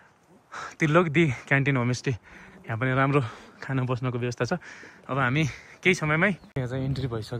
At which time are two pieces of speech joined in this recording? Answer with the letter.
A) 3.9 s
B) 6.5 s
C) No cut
B